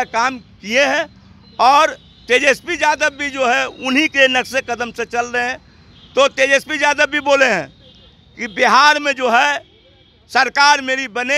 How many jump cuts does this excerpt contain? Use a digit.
0